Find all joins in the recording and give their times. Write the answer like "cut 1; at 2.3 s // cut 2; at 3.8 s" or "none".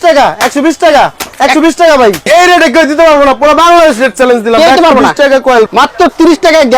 cut 1; at 2.3 s // cut 2; at 5.7 s